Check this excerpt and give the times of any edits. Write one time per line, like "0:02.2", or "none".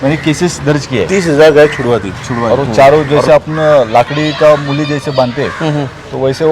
0:02.4

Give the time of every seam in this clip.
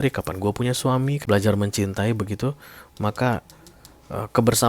0:01.2

